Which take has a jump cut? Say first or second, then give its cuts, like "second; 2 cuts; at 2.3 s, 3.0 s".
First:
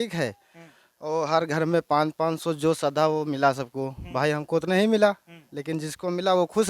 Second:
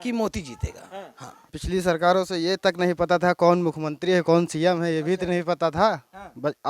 second; 1 cut; at 1.5 s